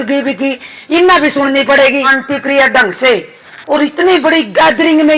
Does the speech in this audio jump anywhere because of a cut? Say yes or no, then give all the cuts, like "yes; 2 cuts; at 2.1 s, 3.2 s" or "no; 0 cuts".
yes; 1 cut; at 2.2 s